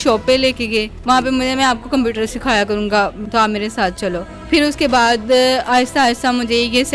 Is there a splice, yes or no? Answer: yes